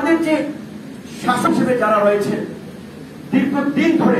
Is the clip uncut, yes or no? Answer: no